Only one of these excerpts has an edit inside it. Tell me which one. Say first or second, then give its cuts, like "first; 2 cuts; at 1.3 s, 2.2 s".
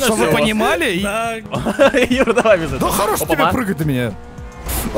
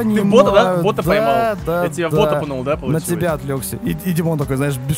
first; 1 cut; at 1.4 s